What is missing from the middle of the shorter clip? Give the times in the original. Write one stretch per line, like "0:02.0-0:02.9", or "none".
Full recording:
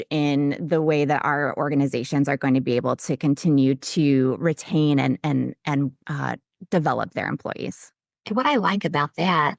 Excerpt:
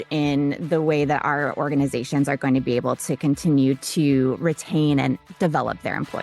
0:05.2-0:06.5